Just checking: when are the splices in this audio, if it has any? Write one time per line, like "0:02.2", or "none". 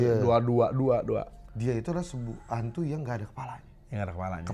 0:01.4

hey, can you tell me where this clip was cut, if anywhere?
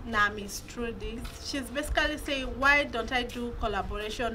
0:01.3

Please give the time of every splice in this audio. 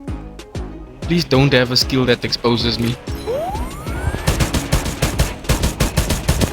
0:01.1

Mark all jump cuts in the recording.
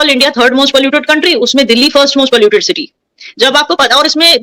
none

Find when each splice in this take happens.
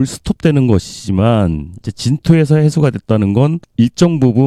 none

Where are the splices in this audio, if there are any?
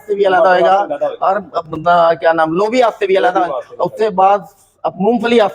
none

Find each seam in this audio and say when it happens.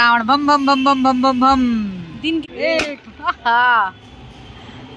0:02.4

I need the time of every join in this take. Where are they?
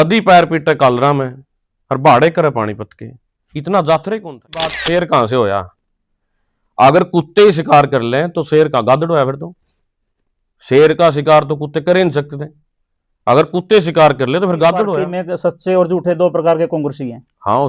0:04.8
0:15.0

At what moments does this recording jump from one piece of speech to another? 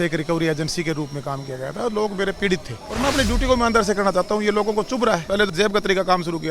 0:02.9
0:05.5

